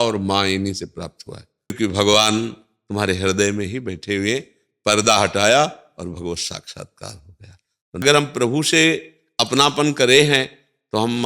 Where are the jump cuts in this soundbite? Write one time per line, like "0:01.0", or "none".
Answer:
0:01.7
0:08.0